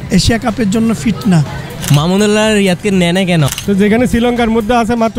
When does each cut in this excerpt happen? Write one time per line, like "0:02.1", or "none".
0:01.8
0:03.5